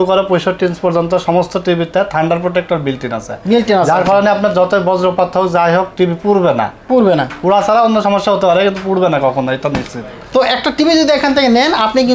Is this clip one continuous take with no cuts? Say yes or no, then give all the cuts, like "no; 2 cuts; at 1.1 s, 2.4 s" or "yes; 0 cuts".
yes; 0 cuts